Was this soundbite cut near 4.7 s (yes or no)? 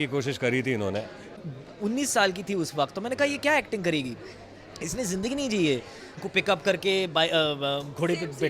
no